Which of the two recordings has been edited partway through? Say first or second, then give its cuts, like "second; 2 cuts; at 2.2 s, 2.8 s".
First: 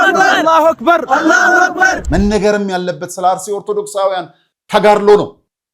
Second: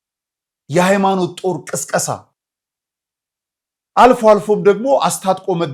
first; 1 cut; at 2.0 s